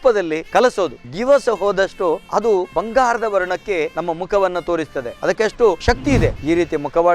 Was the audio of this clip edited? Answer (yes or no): yes